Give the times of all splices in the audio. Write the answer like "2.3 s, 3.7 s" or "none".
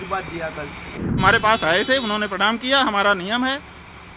1.2 s